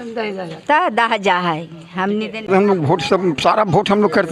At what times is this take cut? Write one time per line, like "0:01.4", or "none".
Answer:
0:02.5

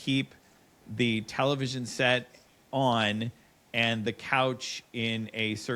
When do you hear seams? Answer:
none

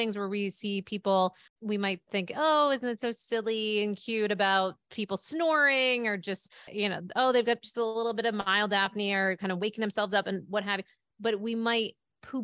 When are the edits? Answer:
0:01.5
0:06.7

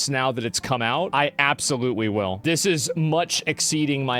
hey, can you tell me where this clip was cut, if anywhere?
0:01.1
0:02.4

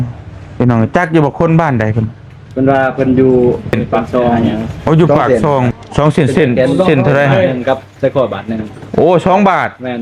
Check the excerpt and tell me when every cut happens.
0:05.7

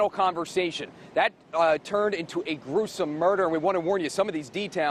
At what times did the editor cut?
none

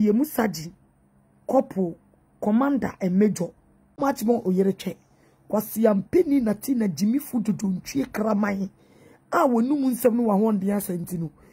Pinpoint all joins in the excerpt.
0:04.0

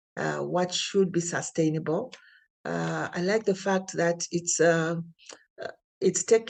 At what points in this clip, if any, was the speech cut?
none

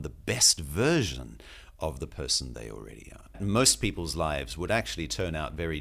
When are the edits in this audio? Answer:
0:03.4

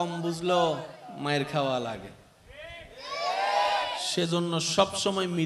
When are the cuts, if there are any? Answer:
none

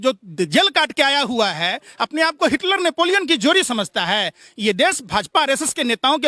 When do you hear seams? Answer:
none

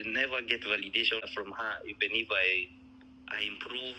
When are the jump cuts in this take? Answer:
0:01.3

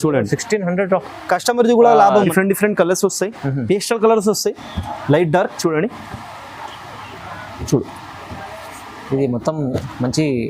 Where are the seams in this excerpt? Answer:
0:02.3

